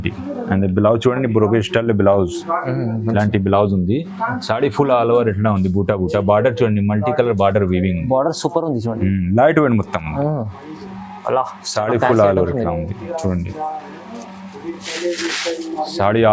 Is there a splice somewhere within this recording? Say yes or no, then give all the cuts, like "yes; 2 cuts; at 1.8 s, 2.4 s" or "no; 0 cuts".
no; 0 cuts